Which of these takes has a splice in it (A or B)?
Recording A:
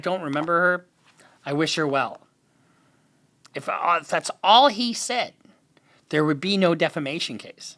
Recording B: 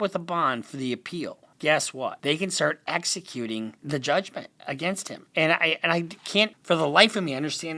B